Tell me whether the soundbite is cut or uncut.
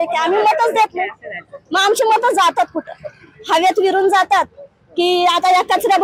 uncut